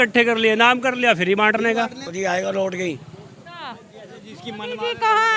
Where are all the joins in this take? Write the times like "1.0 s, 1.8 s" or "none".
2.1 s

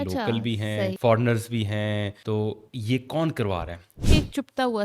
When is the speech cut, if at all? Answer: 1.0 s, 2.1 s, 4.1 s

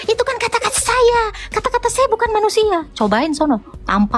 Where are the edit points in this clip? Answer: none

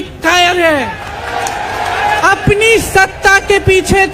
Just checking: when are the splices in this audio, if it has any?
2.2 s

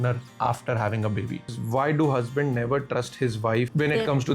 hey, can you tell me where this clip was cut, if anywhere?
1.5 s

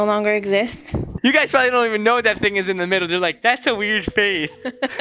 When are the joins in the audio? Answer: 1.0 s

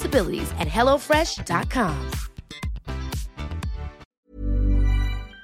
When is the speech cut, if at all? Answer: 4.1 s

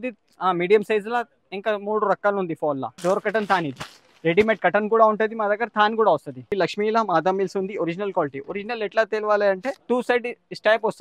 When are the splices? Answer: 2.9 s, 6.5 s, 9.7 s

